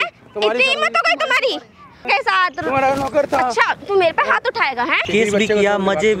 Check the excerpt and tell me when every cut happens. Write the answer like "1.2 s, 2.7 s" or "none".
2.0 s, 5.1 s